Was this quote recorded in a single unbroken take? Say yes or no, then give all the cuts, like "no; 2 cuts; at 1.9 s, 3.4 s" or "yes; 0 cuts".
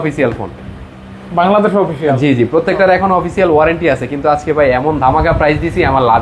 yes; 0 cuts